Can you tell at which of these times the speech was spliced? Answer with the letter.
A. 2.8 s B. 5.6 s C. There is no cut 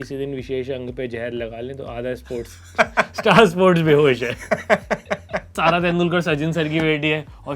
B